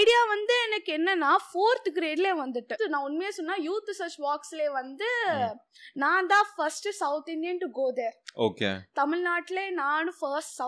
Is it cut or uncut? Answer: cut